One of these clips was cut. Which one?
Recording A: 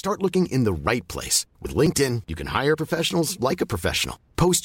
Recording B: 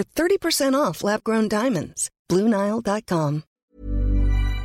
B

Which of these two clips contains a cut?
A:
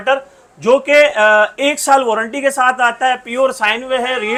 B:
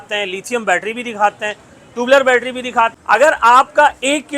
B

